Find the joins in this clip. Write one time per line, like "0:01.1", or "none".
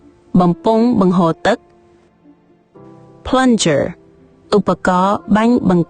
0:01.7